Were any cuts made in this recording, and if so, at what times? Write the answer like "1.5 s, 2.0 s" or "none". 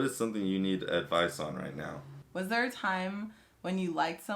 2.2 s